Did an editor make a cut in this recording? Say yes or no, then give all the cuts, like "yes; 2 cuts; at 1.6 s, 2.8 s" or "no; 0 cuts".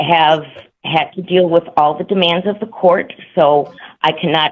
no; 0 cuts